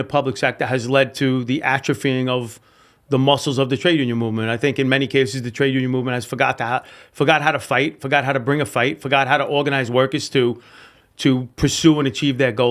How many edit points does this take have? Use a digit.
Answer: 0